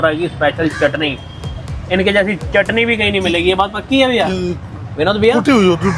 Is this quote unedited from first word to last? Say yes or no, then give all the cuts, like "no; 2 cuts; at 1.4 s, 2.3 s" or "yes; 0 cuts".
yes; 0 cuts